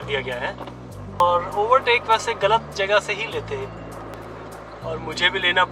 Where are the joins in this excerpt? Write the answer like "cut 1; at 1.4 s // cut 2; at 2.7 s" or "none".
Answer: cut 1; at 1.2 s // cut 2; at 4.2 s